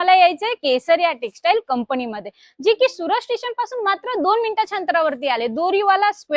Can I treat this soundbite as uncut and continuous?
yes; 0 cuts

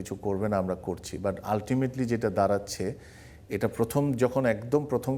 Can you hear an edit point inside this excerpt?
no; 0 cuts

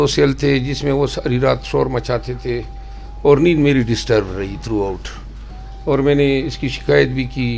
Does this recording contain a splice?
no; 0 cuts

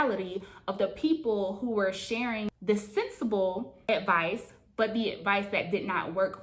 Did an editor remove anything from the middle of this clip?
yes; 1 cut; at 3.8 s

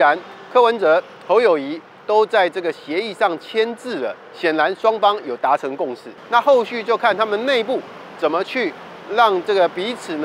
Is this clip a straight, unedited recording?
no; 1 cut; at 6.2 s

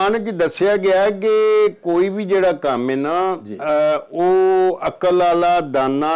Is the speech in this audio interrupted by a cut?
no; 0 cuts

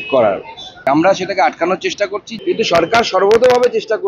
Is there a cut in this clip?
yes; 2 cuts; at 0.8 s, 2.3 s

